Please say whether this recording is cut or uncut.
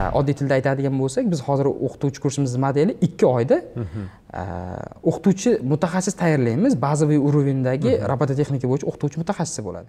uncut